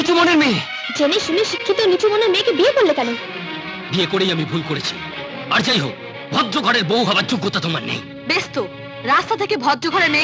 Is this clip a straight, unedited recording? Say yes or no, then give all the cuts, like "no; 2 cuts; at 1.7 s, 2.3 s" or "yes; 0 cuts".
yes; 0 cuts